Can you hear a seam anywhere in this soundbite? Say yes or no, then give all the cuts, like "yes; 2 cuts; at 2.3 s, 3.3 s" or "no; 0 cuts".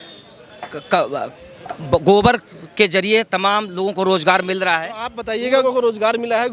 yes; 1 cut; at 5.6 s